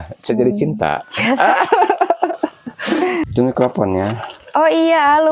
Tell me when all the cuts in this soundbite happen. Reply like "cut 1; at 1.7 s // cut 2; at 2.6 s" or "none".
cut 1; at 3.3 s